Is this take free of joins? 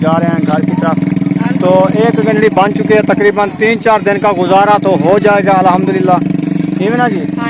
yes; 0 cuts

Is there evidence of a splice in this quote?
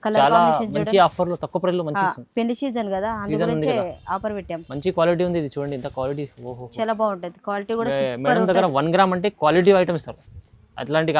no; 0 cuts

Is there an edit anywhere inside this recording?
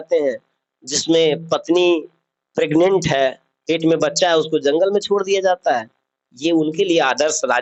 no; 0 cuts

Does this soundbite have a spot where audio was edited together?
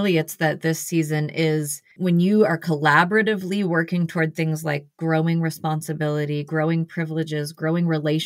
yes; 1 cut; at 2.0 s

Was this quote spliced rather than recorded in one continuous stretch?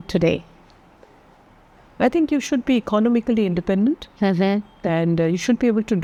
no; 0 cuts

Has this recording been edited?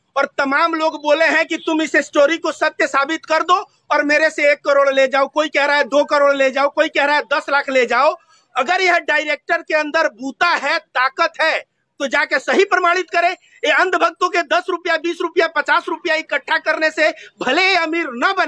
no; 0 cuts

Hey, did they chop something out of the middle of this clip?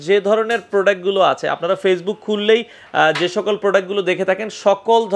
no; 0 cuts

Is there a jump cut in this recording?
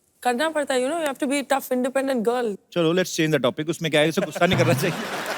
yes; 1 cut; at 2.6 s

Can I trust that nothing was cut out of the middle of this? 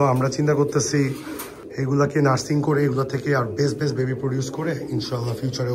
yes; 0 cuts

